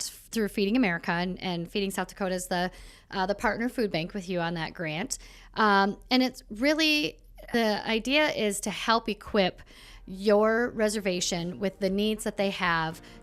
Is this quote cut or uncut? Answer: cut